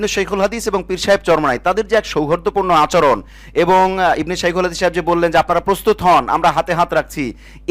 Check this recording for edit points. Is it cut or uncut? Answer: uncut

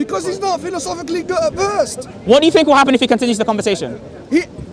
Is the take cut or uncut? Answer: uncut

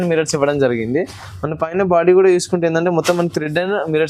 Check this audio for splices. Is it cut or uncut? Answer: uncut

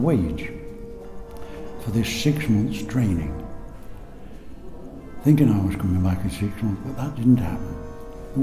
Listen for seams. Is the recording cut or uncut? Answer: uncut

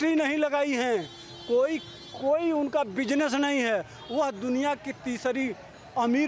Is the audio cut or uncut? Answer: uncut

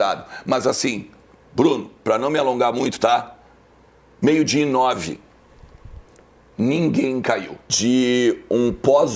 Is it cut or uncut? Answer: cut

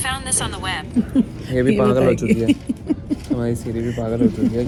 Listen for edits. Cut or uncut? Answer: uncut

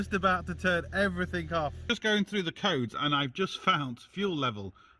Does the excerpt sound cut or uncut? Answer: cut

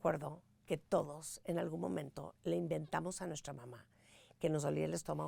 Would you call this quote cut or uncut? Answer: uncut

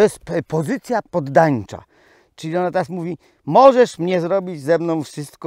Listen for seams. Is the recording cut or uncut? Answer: cut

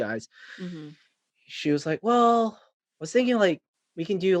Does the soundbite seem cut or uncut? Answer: uncut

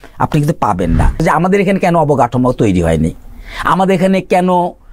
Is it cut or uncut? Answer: cut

